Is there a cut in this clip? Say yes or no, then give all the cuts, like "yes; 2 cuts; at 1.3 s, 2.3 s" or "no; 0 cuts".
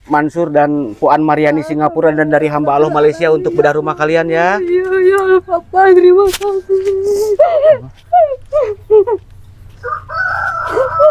no; 0 cuts